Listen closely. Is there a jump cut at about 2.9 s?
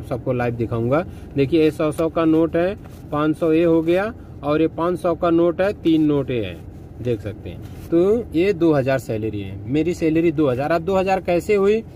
no; 0 cuts

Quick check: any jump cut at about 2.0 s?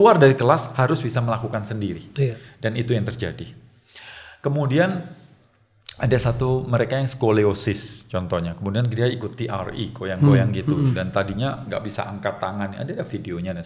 no; 0 cuts

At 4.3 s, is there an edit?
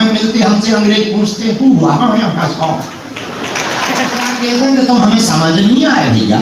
yes; 1 cut; at 4.3 s

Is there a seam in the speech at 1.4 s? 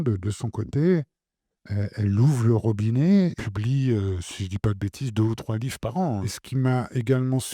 no; 2 cuts; at 3.4 s, 6.4 s

